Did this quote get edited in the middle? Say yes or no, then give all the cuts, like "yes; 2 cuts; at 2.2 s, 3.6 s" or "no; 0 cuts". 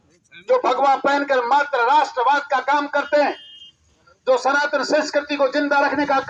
no; 0 cuts